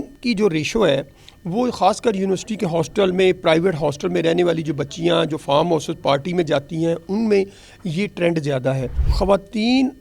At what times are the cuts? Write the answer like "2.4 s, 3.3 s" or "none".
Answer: 9.0 s